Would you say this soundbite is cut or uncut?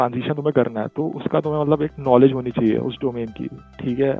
uncut